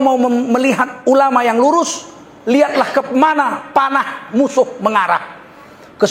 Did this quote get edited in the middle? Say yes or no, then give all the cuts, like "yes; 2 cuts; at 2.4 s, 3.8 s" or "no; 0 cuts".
no; 0 cuts